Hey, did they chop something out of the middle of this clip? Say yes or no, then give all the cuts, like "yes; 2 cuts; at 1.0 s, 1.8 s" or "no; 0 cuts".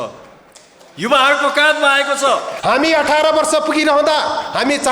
yes; 1 cut; at 2.5 s